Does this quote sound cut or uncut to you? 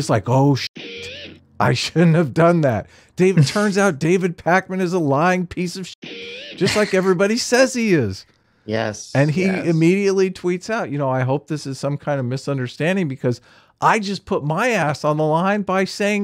uncut